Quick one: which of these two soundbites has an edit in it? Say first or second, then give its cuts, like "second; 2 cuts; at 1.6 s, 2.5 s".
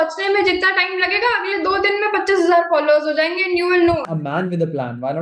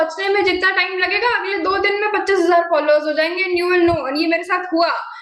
first; 1 cut; at 4.1 s